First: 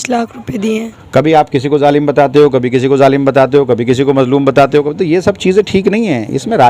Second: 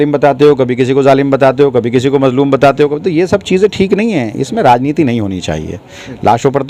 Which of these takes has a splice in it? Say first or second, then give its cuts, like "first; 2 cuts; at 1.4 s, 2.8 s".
first; 1 cut; at 0.9 s